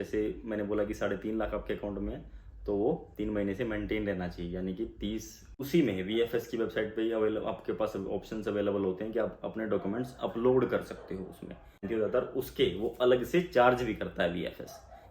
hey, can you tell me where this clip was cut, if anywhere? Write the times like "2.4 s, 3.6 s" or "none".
5.7 s, 11.9 s

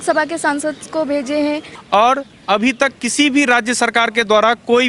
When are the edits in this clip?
1.7 s

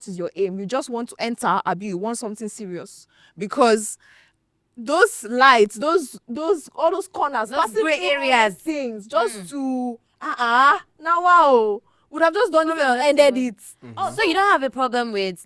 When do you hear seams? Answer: none

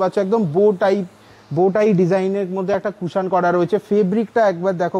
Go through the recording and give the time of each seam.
none

